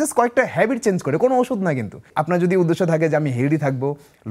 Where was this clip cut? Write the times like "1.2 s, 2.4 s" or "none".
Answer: 2.1 s